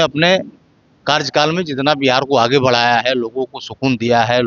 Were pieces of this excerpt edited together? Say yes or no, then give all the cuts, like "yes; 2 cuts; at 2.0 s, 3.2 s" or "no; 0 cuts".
no; 0 cuts